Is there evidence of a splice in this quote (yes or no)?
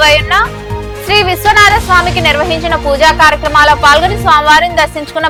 no